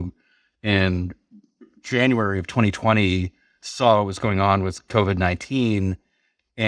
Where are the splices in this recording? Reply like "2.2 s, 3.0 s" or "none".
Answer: none